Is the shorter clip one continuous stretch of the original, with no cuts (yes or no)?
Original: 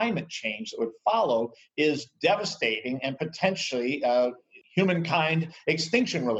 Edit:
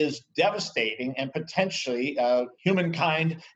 no